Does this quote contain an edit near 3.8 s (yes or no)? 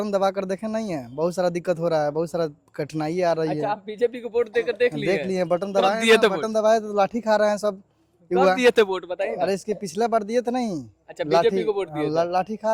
no